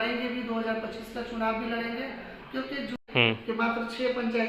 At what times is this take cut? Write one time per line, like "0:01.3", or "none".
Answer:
0:03.0